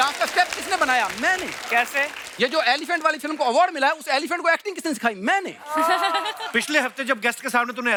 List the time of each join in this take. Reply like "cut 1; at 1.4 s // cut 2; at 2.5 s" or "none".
none